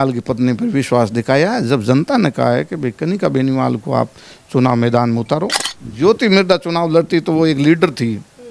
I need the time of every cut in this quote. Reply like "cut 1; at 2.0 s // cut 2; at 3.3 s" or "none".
cut 1; at 5.6 s